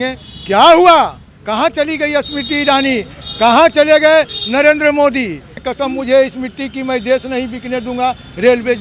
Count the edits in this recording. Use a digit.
1